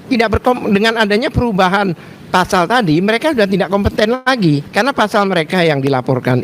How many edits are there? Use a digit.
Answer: 1